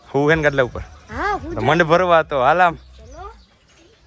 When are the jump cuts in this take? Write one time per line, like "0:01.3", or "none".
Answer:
none